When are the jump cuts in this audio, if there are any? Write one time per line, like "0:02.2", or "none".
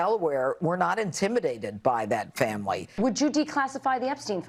0:02.9